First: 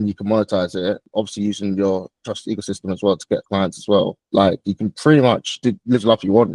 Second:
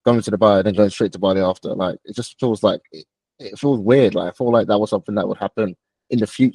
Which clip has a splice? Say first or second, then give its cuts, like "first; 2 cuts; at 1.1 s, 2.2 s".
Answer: first; 3 cuts; at 1.0 s, 4.2 s, 5.5 s